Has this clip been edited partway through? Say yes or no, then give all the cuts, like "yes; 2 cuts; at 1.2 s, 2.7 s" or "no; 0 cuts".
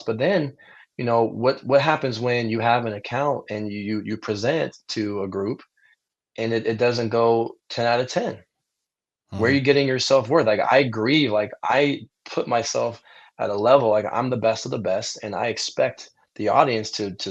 no; 0 cuts